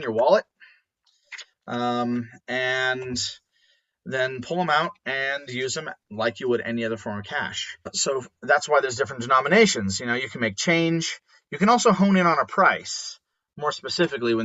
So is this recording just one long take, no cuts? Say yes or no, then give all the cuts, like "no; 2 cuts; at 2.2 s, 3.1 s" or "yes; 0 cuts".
no; 1 cut; at 8.0 s